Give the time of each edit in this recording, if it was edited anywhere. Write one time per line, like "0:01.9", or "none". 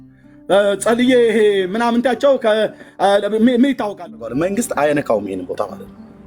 0:04.0